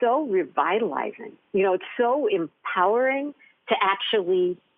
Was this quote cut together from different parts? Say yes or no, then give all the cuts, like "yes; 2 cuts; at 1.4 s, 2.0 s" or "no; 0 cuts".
no; 0 cuts